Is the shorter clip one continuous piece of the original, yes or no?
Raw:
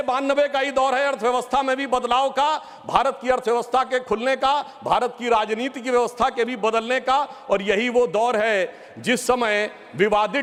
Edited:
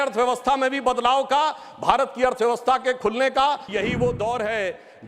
no